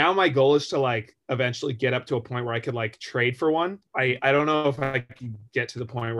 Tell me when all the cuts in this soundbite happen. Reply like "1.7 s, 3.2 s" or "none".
3.8 s